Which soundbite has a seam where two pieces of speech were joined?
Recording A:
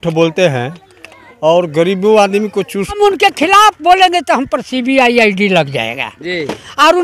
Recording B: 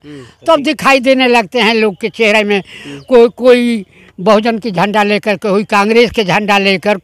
A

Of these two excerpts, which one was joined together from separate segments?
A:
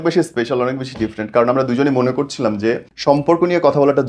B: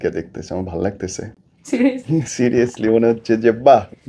A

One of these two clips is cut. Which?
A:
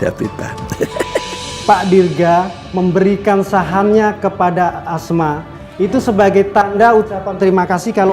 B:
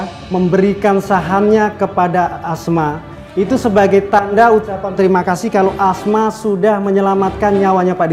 A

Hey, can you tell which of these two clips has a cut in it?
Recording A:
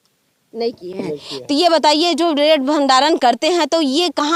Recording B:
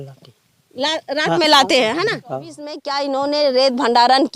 B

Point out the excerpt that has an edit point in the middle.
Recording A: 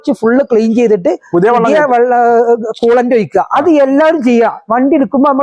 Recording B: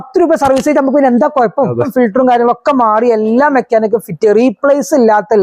B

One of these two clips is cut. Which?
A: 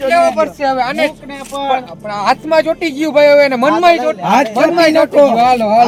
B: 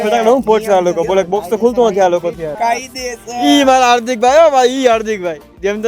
B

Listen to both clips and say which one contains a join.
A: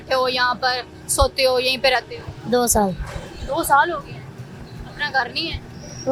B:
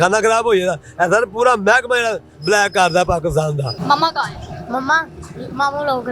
B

